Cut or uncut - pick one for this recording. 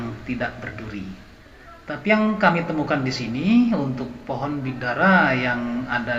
uncut